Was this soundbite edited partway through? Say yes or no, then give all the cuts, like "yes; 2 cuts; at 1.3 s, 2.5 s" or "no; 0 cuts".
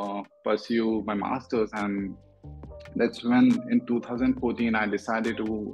no; 0 cuts